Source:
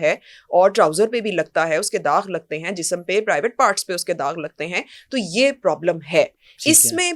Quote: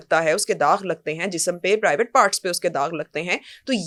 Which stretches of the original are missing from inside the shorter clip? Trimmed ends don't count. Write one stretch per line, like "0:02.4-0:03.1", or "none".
none